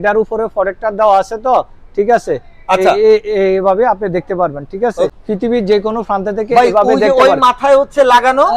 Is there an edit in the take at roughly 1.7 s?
no; 1 cut; at 5.1 s

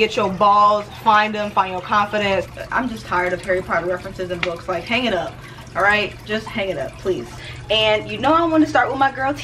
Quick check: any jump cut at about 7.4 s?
yes; 2 cuts; at 2.6 s, 7.4 s

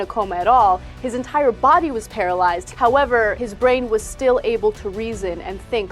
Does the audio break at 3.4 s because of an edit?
yes; 2 cuts; at 2.7 s, 3.4 s

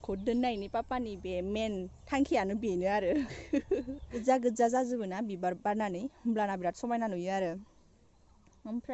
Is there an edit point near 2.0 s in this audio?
no; 1 cut; at 4.2 s

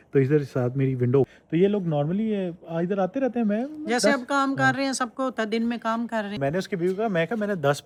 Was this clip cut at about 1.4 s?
no; 0 cuts

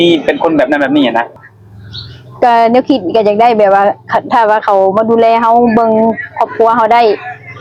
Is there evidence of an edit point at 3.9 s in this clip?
no; 1 cut; at 1.3 s

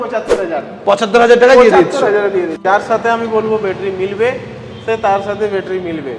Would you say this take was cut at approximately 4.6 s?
no; 1 cut; at 2.6 s

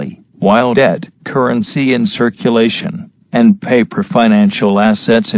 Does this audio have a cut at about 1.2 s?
no; 1 cut; at 2.5 s

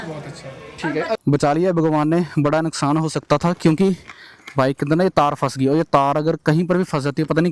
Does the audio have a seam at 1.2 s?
yes; 1 cut; at 1.2 s

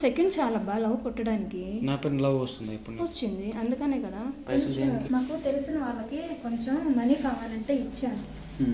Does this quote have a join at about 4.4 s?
yes; 1 cut; at 4.4 s

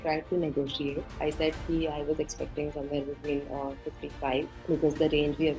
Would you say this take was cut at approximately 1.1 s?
yes; 2 cuts; at 1.1 s, 4.6 s

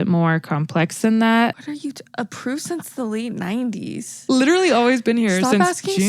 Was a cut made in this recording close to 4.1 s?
yes; 2 cuts; at 1.6 s, 4.1 s

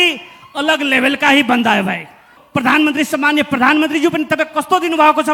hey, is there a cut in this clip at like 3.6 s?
no; 1 cut; at 2.4 s

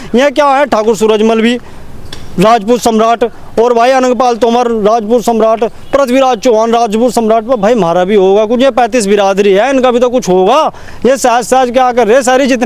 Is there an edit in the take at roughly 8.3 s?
no; 0 cuts

